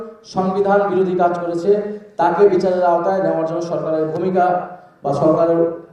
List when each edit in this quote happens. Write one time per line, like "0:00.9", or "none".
none